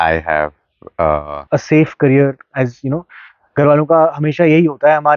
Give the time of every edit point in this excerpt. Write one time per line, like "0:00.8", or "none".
0:01.4